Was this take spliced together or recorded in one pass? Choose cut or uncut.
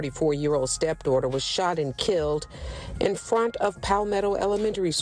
cut